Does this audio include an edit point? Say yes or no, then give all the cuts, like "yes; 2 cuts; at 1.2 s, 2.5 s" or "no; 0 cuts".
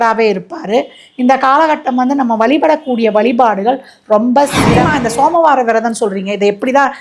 yes; 1 cut; at 4.9 s